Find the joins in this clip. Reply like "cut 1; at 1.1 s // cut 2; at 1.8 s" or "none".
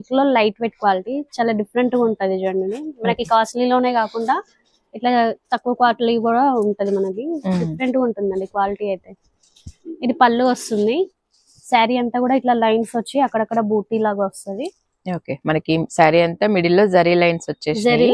none